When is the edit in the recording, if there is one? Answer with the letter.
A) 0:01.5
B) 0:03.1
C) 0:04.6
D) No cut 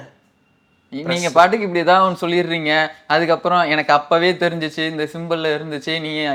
D